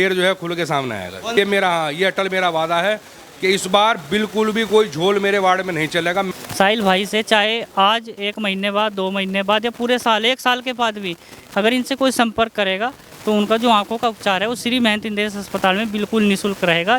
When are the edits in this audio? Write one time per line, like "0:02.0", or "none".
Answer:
0:01.3
0:06.3